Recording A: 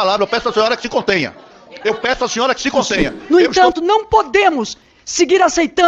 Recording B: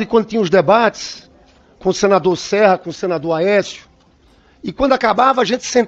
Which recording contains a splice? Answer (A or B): A